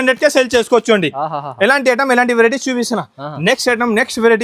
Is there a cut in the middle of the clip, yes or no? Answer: no